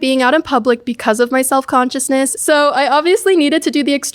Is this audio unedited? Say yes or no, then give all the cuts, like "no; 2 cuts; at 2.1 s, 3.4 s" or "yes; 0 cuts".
no; 1 cut; at 2.4 s